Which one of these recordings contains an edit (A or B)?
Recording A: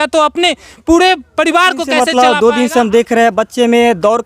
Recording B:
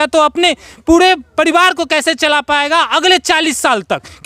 A